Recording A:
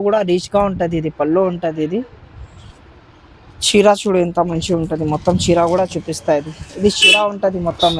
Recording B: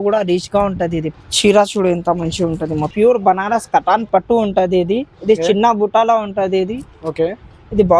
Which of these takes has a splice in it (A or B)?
B